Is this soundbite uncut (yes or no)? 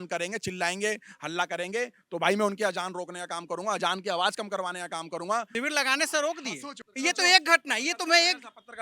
no